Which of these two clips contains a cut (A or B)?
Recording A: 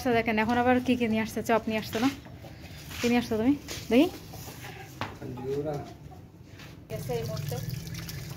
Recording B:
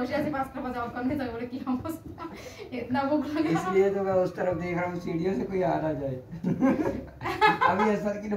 A